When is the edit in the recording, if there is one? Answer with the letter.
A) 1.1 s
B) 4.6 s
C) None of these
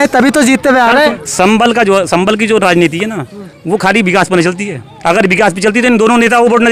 A